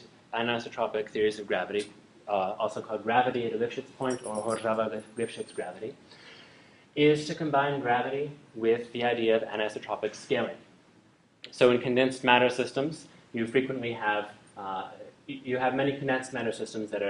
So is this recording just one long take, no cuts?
yes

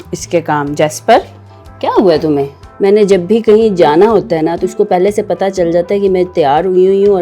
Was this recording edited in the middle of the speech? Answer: yes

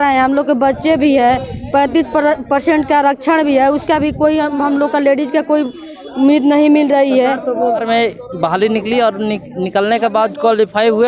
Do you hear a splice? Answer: yes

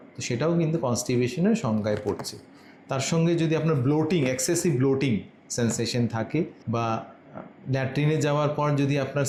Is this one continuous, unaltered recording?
yes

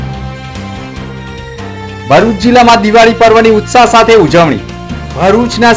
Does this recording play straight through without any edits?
no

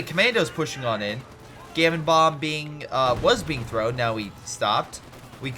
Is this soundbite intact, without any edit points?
yes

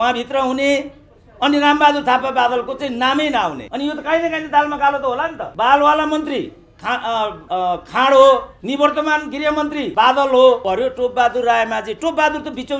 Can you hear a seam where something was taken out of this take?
yes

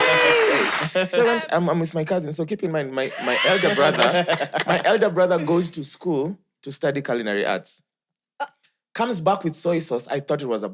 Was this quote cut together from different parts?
yes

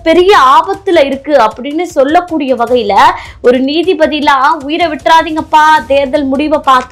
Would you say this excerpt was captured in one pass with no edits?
yes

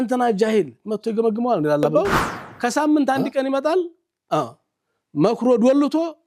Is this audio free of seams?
no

